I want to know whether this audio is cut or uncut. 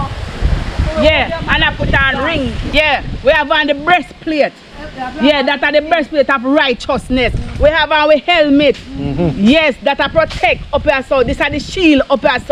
cut